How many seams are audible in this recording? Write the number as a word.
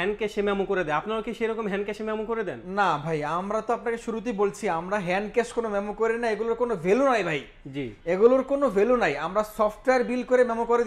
zero